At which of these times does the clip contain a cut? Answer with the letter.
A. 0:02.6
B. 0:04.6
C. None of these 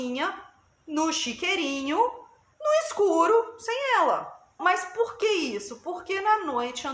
B